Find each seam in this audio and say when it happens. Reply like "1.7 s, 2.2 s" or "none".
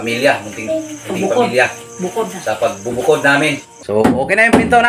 3.7 s